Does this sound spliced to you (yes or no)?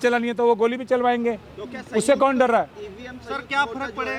no